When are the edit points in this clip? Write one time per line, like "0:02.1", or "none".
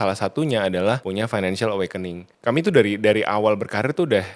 0:01.0
0:02.3